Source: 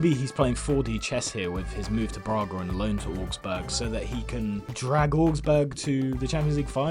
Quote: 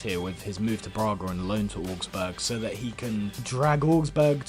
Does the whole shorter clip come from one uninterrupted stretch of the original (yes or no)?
yes